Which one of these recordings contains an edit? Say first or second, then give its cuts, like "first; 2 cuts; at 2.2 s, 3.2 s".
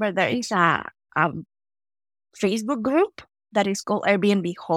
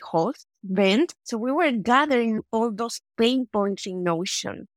second; 2 cuts; at 1.2 s, 2.4 s